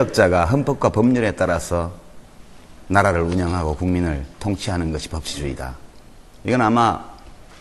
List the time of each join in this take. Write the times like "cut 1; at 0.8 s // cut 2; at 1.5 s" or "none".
cut 1; at 1.0 s

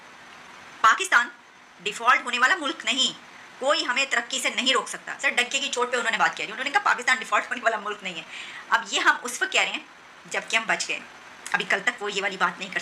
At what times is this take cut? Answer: none

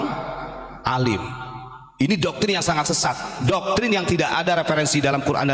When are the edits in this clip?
none

